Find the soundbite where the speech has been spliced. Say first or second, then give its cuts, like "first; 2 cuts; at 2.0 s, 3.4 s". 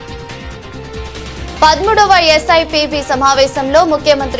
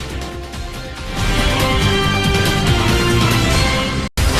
first; 1 cut; at 1.3 s